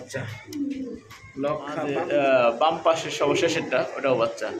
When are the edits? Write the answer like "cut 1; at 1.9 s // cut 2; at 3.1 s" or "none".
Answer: cut 1; at 1.9 s